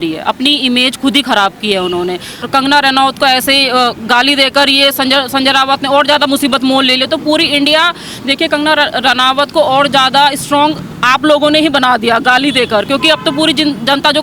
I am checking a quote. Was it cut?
yes; 1 cut; at 2.4 s

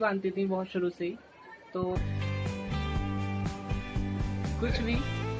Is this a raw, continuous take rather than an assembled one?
no; 1 cut; at 2.0 s

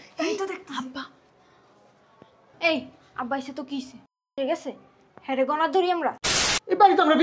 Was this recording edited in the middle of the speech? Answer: yes; 1 cut; at 6.2 s

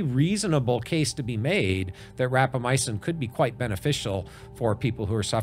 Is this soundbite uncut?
yes; 0 cuts

